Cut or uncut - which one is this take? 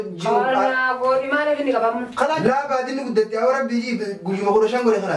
cut